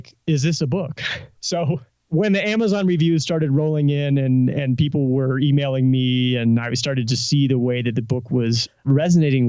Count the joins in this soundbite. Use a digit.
1